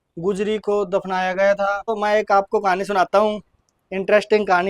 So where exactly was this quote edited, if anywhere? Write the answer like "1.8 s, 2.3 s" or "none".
2.0 s